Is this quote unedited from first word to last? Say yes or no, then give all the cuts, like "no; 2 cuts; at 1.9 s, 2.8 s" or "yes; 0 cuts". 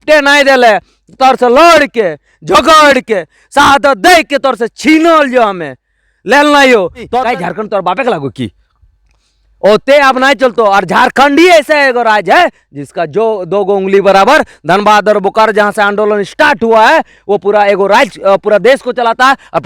no; 1 cut; at 7.1 s